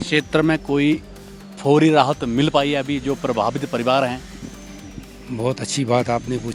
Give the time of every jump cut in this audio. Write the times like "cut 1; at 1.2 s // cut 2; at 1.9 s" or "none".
none